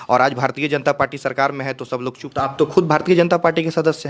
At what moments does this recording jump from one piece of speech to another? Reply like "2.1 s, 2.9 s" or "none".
2.4 s